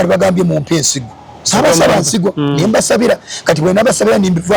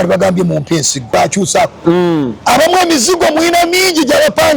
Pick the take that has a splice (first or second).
second